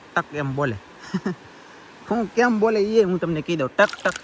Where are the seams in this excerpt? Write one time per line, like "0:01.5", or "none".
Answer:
none